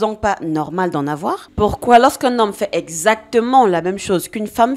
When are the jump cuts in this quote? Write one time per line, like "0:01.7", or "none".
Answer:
0:01.5